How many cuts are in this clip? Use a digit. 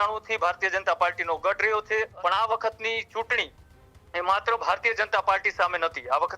1